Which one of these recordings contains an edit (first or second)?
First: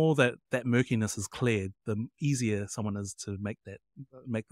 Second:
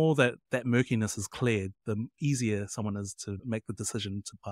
second